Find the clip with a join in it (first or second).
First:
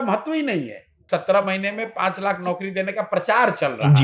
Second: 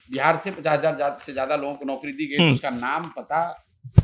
first